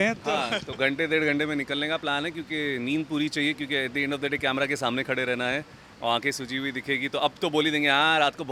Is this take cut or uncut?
uncut